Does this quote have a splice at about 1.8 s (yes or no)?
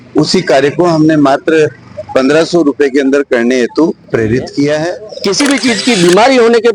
no